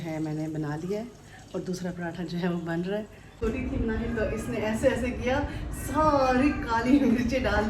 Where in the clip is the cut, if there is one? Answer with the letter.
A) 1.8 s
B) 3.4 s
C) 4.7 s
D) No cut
B